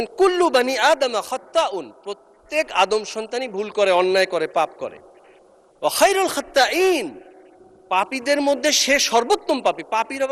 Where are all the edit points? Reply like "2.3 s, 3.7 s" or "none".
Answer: none